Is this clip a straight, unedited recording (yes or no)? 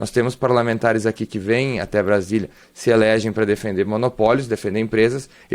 yes